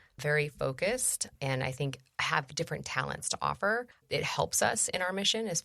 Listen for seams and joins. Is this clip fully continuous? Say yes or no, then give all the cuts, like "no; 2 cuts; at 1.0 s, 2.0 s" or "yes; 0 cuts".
no; 1 cut; at 4.0 s